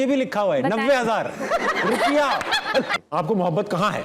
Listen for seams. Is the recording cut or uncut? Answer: cut